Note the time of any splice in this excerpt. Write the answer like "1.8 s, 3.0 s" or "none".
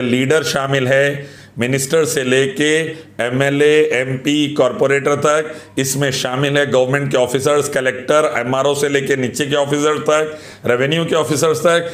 none